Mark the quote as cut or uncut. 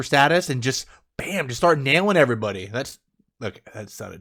uncut